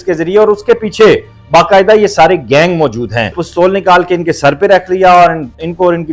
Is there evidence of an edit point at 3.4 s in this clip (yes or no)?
yes